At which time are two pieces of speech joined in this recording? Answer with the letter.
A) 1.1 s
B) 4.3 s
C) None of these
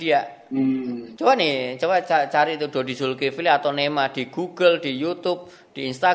A